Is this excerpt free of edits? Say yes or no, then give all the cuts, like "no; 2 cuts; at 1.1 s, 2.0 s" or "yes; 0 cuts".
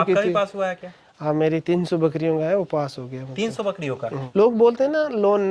no; 1 cut; at 4.2 s